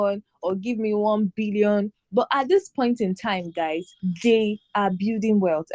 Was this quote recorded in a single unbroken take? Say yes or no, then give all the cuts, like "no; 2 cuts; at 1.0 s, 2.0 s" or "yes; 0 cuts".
no; 1 cut; at 3.9 s